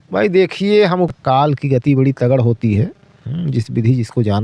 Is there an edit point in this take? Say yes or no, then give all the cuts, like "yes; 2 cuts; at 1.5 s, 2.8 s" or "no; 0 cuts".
yes; 1 cut; at 1.1 s